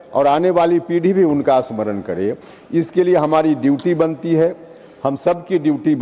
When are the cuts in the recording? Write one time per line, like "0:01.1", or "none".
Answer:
none